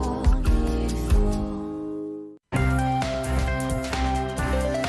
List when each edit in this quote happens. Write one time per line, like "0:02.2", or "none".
0:02.3